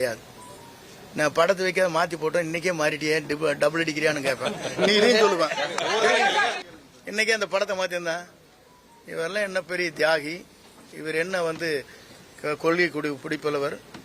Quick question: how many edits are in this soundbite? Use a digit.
1